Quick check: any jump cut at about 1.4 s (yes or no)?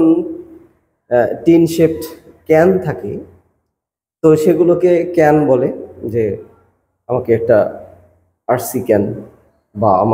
no